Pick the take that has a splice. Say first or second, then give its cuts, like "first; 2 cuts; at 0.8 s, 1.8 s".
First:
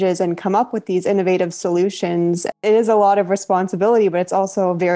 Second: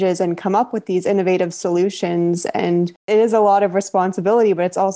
first; 1 cut; at 2.5 s